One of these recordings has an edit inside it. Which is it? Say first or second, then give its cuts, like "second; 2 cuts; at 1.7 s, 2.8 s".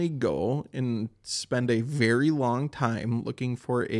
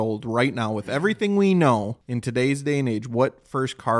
second; 1 cut; at 2.0 s